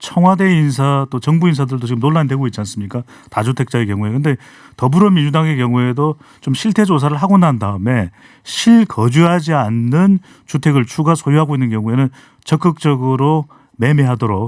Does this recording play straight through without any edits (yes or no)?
yes